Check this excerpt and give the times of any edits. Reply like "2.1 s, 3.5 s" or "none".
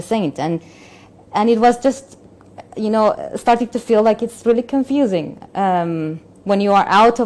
none